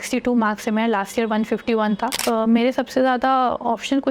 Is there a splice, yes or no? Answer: yes